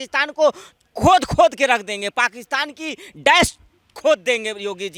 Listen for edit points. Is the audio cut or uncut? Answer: uncut